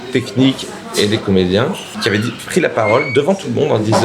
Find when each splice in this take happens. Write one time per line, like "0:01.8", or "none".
0:01.9

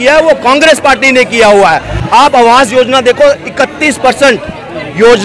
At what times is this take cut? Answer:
0:01.9

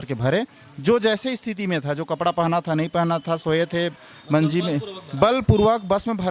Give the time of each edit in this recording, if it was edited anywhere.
none

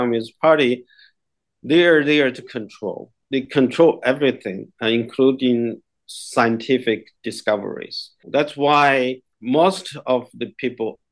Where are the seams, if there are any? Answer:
0:08.2
0:09.3

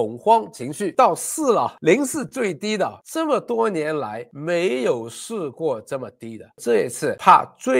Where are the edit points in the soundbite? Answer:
0:00.9
0:06.6

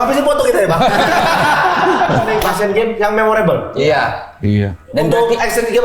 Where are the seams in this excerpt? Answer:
0:02.4

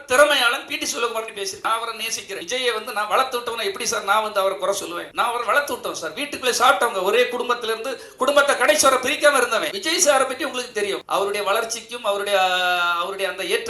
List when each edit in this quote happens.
0:01.6
0:09.7

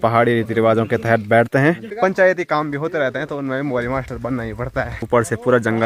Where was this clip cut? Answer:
0:01.9
0:05.0

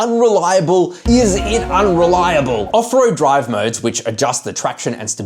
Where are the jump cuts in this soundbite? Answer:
0:02.6

